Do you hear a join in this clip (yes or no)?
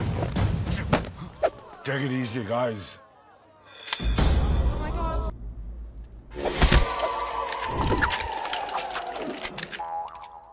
yes